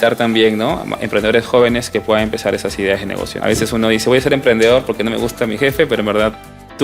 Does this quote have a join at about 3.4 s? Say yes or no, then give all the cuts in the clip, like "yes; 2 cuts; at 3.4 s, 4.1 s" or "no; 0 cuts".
yes; 1 cut; at 3.4 s